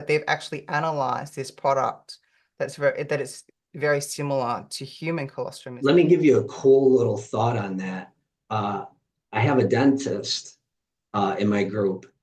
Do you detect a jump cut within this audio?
yes; 1 cut; at 5.7 s

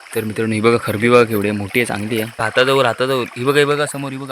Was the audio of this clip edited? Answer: yes; 1 cut; at 2.4 s

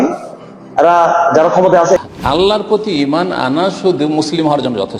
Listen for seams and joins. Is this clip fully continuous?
no; 1 cut; at 2.0 s

